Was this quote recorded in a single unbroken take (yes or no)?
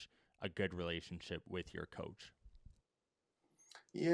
yes